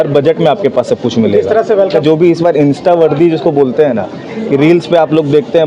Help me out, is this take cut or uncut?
cut